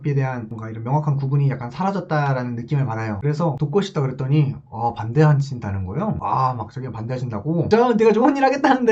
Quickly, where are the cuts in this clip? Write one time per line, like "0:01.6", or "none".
0:03.2
0:07.7